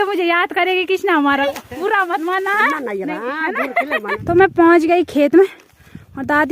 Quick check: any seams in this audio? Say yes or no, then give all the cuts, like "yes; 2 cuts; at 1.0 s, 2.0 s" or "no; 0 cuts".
yes; 2 cuts; at 1.4 s, 4.2 s